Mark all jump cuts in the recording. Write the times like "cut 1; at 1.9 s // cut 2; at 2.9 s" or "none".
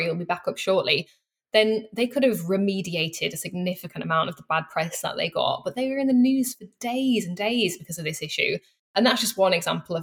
cut 1; at 8.9 s